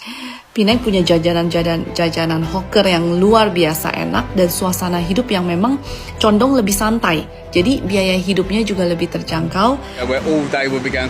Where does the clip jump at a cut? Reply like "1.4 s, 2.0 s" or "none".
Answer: 10.0 s